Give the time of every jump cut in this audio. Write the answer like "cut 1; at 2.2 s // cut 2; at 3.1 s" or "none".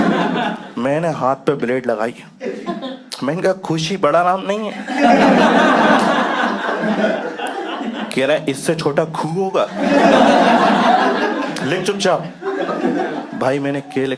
none